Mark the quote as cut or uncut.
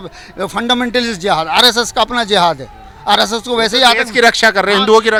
uncut